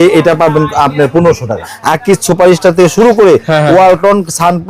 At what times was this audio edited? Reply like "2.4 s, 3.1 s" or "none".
1.7 s